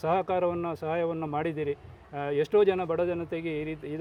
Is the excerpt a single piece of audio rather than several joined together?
yes; 0 cuts

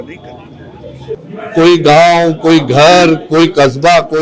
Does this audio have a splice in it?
yes; 1 cut; at 1.2 s

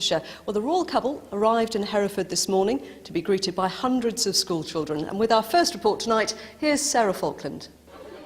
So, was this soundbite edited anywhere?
yes; 1 cut; at 2.4 s

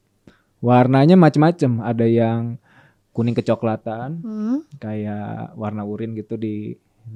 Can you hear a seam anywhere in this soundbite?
no; 0 cuts

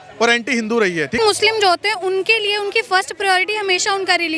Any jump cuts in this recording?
yes; 1 cut; at 1.2 s

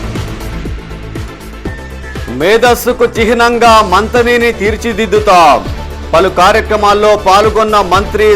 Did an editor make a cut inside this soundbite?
yes; 1 cut; at 1.4 s

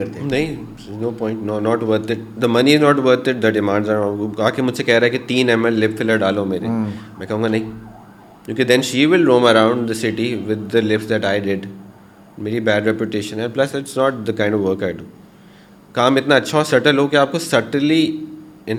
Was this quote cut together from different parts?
no; 0 cuts

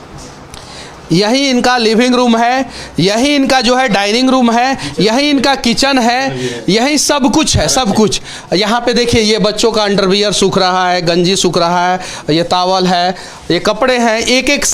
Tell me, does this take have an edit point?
no; 0 cuts

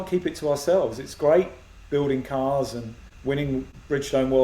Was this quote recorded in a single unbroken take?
no; 1 cut; at 3.4 s

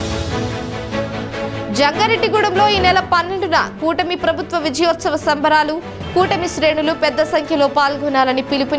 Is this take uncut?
no; 1 cut; at 1.0 s

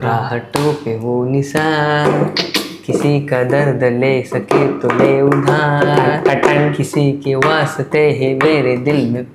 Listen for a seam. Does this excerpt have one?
no; 0 cuts

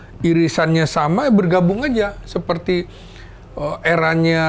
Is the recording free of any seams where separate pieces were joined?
yes; 0 cuts

